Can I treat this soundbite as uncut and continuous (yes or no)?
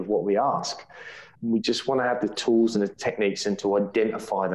yes